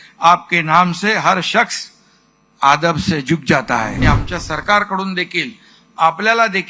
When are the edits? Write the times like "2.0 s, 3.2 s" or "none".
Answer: 4.0 s

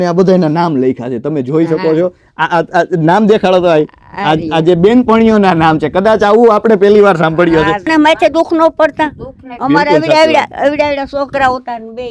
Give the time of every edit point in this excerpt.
7.9 s

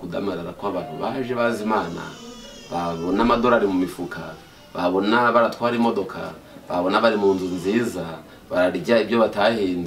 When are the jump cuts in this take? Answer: none

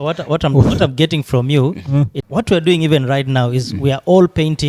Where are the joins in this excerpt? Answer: 2.2 s

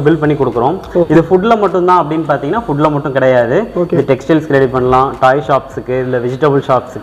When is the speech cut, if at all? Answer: 1.1 s

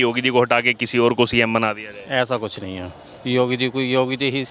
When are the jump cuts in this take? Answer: none

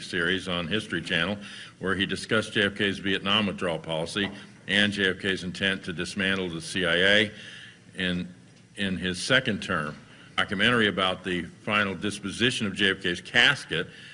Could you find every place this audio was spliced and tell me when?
none

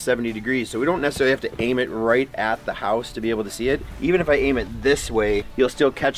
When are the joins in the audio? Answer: none

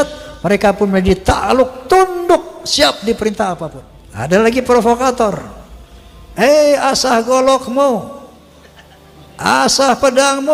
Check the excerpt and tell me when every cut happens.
4.1 s

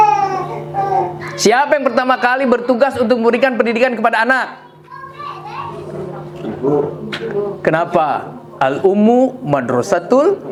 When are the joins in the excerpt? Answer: none

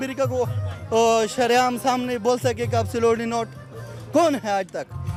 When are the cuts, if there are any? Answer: none

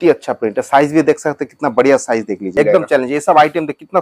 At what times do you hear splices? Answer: 2.5 s

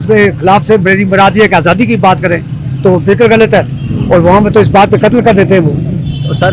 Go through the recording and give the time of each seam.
none

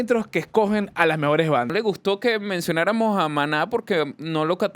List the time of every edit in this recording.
1.7 s

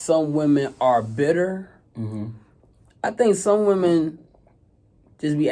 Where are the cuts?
none

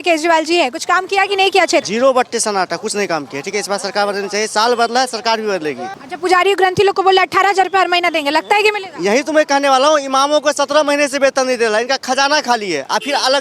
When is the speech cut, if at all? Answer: 1.9 s, 5.9 s

